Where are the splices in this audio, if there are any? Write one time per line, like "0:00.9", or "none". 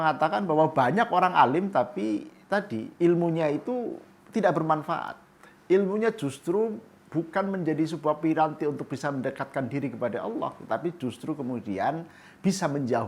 none